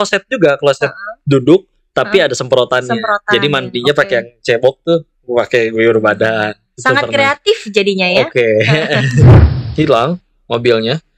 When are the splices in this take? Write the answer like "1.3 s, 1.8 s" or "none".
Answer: 9.4 s